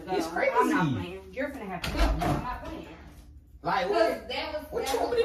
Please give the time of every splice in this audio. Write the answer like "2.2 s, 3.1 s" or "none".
none